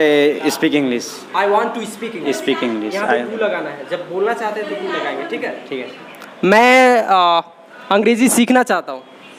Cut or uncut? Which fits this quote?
uncut